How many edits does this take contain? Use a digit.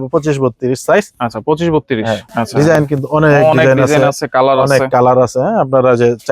1